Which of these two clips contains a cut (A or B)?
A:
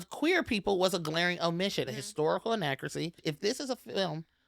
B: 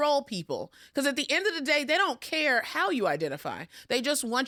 A